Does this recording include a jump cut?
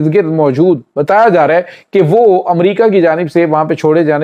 no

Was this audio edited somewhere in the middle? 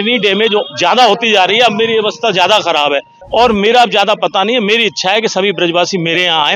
yes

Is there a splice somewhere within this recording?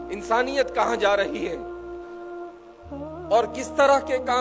no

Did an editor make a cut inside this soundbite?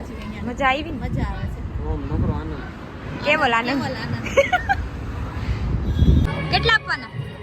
yes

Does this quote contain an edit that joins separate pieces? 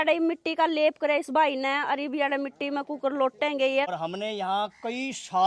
yes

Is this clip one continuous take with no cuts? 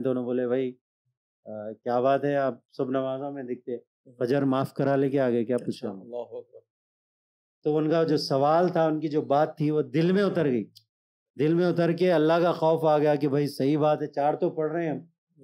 yes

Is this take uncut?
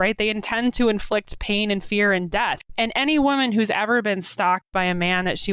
no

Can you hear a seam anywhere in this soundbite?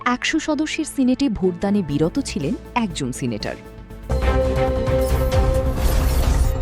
yes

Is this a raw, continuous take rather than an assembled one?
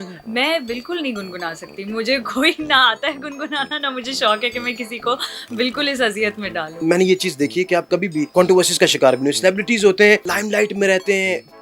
yes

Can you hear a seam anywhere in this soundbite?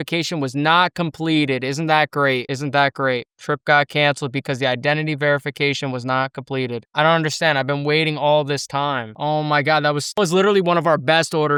no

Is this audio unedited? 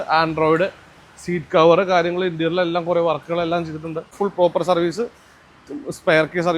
no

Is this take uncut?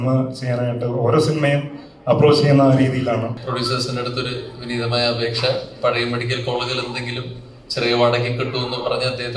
no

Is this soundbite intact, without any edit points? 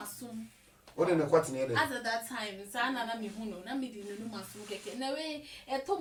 yes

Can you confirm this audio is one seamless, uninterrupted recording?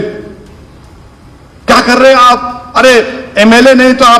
yes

